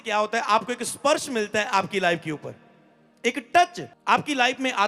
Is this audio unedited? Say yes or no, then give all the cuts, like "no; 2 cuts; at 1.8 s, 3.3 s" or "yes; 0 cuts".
no; 1 cut; at 3.9 s